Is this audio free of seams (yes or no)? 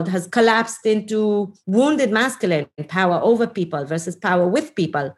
no